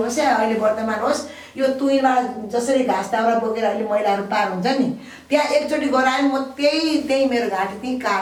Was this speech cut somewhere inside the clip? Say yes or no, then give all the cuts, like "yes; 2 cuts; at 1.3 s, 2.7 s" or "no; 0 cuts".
no; 0 cuts